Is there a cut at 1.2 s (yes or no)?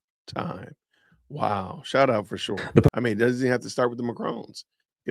no